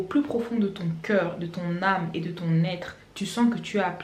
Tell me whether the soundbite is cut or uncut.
uncut